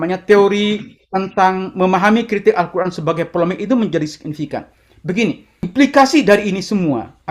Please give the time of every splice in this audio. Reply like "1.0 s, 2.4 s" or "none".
5.6 s

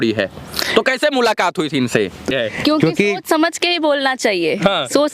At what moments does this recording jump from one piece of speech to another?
2.3 s

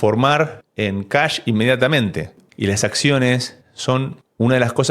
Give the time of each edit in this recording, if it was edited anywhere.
2.4 s

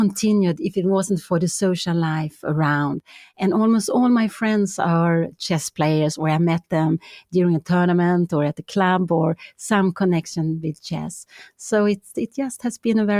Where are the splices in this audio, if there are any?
none

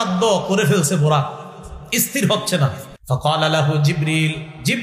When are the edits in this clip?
2.9 s

